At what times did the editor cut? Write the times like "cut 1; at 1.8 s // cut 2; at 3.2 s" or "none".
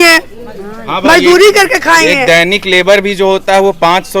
none